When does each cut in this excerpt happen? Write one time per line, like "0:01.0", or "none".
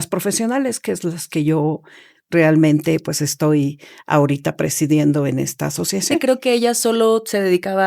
0:06.2